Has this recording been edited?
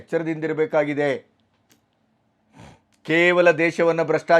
no; 0 cuts

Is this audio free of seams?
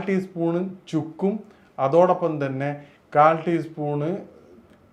yes; 0 cuts

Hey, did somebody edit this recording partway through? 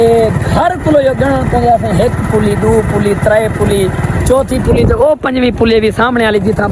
no; 0 cuts

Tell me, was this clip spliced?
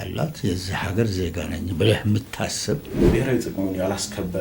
yes; 1 cut; at 2.9 s

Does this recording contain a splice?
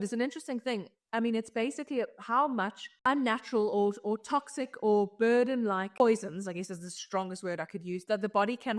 yes; 2 cuts; at 3.0 s, 6.0 s

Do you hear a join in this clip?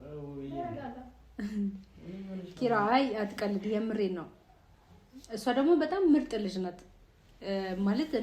no; 0 cuts

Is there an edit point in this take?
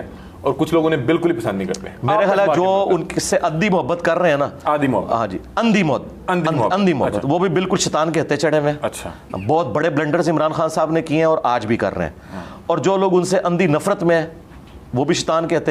no; 0 cuts

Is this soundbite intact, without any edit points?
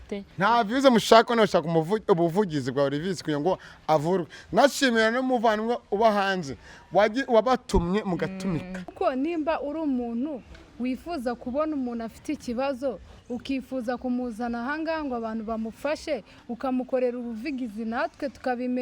no; 1 cut; at 8.9 s

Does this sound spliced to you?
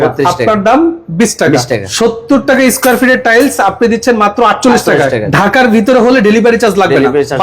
yes; 2 cuts; at 1.9 s, 5.3 s

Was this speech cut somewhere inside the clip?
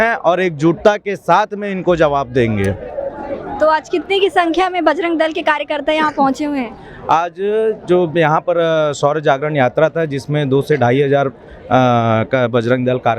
no; 0 cuts

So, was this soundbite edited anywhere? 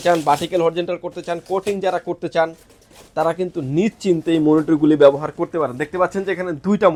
no; 0 cuts

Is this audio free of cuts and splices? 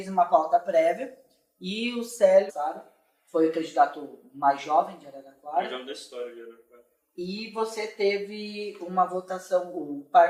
yes; 0 cuts

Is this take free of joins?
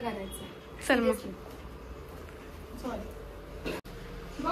yes; 0 cuts

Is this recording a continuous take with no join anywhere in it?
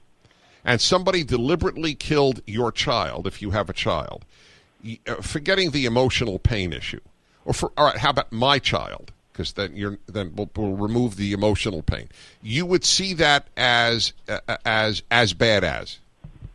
yes; 0 cuts

